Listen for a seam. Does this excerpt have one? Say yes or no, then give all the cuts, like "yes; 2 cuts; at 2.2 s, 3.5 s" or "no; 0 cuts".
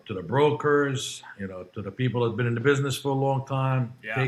no; 0 cuts